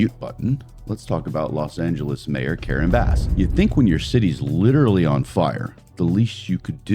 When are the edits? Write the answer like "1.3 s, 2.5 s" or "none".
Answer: 3.2 s